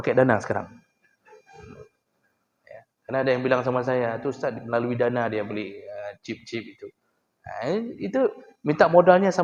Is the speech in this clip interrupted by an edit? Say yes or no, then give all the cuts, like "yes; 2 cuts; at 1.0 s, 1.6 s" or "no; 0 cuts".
no; 0 cuts